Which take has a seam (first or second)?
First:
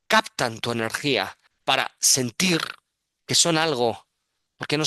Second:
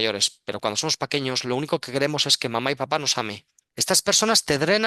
second